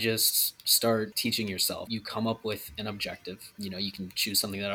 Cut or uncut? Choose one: cut